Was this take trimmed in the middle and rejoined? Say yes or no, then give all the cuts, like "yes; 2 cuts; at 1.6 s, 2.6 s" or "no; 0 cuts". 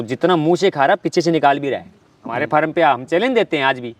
yes; 1 cut; at 2.4 s